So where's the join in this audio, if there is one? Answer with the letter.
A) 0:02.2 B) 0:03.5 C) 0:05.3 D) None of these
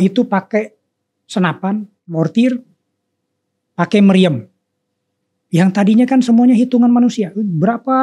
A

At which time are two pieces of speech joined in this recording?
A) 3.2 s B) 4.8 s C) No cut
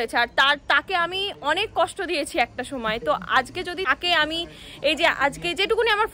C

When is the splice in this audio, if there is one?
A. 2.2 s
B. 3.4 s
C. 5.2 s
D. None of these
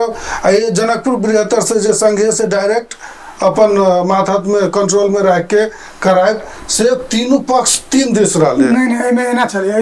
D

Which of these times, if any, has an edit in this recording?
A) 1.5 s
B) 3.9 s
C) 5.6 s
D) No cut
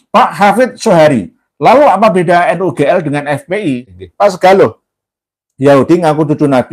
B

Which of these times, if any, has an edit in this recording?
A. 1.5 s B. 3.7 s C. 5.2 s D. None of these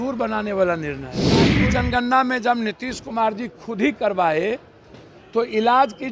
A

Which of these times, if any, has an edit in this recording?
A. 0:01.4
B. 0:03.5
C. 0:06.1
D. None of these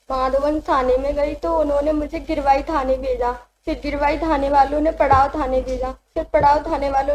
D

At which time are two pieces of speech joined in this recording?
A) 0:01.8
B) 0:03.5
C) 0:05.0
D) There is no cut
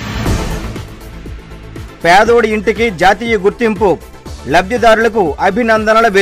A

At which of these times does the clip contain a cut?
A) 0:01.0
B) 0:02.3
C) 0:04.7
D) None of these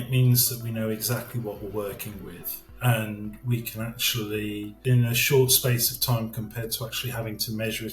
C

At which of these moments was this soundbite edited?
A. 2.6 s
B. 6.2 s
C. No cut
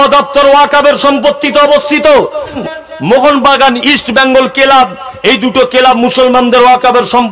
A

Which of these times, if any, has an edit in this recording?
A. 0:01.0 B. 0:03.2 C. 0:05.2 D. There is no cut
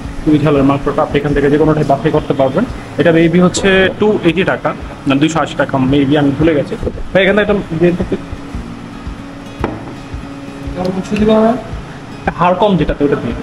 D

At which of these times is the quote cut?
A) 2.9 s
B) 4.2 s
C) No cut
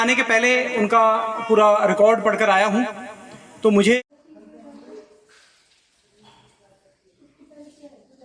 B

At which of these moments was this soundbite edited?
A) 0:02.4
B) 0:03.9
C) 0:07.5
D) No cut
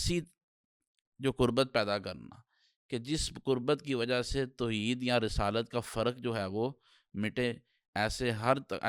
D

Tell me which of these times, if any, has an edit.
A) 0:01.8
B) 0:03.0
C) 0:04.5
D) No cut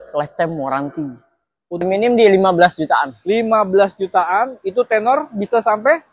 A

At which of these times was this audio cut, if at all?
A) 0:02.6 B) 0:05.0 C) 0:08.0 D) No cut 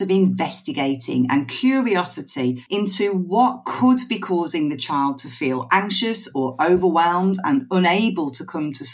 A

